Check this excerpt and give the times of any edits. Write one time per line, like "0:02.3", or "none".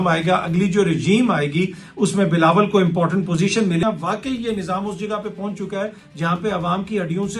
0:03.8